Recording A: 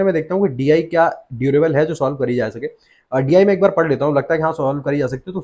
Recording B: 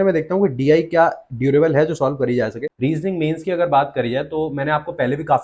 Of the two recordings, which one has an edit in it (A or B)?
B